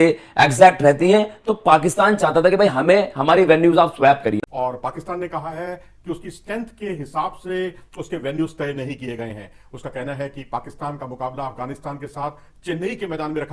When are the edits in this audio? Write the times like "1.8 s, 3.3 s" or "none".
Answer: 4.4 s